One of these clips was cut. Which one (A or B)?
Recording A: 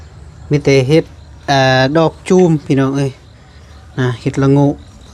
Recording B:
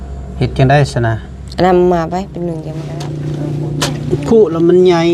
B